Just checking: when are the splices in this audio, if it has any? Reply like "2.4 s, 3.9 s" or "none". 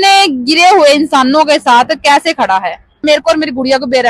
3.0 s